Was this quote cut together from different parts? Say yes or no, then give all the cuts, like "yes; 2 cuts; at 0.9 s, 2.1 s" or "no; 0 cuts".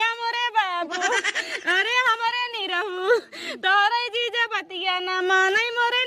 no; 0 cuts